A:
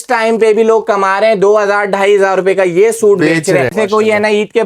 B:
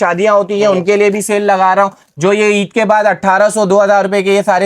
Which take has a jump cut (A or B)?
A